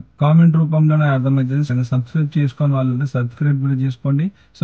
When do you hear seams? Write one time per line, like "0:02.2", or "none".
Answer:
0:01.7